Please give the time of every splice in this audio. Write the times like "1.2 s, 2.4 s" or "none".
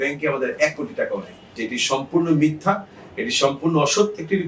1.5 s